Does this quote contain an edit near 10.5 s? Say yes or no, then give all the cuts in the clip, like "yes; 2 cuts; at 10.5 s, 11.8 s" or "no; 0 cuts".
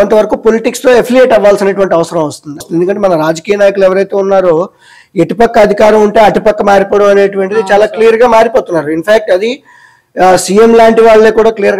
no; 1 cut; at 2.6 s